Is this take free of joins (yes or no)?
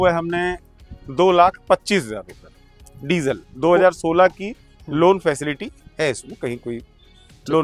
yes